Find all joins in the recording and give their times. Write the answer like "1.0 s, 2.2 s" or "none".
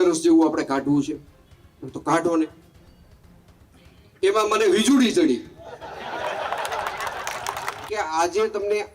7.8 s